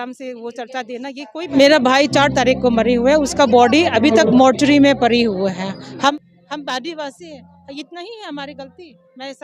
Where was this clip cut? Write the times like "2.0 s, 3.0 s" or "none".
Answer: 1.5 s, 6.1 s